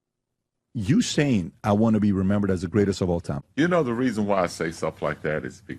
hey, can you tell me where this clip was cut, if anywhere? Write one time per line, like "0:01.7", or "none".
0:03.3